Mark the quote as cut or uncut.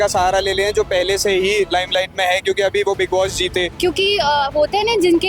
cut